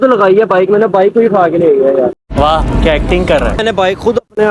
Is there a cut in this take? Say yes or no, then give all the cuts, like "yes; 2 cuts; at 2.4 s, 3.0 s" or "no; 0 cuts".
yes; 2 cuts; at 2.2 s, 3.6 s